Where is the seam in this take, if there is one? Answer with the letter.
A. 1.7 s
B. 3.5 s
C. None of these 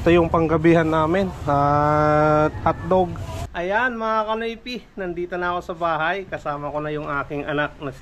B